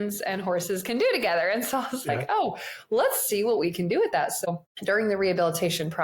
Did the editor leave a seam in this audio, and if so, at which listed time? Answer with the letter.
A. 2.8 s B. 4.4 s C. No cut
B